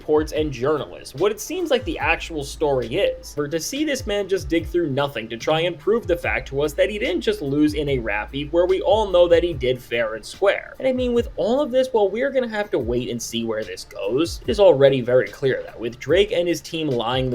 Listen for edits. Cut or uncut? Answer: cut